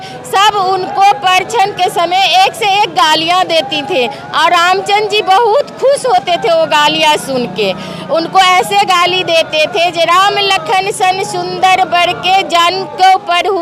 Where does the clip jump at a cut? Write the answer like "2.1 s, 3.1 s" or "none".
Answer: none